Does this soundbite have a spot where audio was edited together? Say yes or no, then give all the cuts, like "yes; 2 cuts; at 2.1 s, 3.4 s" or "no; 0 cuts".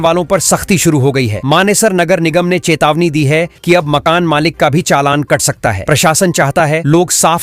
no; 0 cuts